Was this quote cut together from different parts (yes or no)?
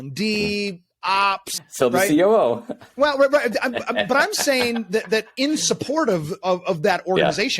yes